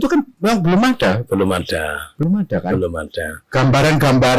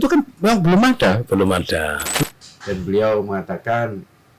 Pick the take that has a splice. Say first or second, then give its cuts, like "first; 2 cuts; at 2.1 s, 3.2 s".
second; 1 cut; at 2.2 s